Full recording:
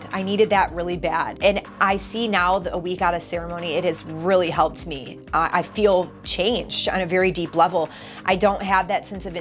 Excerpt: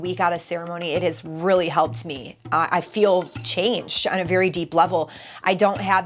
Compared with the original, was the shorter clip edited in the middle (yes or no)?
no